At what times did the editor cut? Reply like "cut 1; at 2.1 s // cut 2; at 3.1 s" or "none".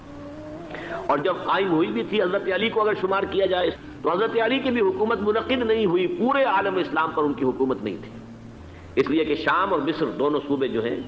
cut 1; at 3.7 s